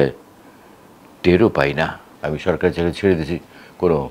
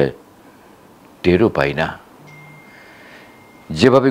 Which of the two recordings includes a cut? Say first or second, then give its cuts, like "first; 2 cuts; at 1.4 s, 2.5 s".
first; 1 cut; at 2.1 s